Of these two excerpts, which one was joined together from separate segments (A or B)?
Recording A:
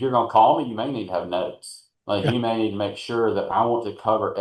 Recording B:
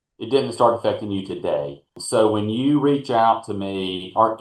B